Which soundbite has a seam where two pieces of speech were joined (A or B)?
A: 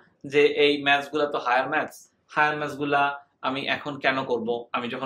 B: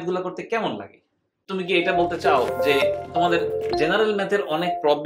B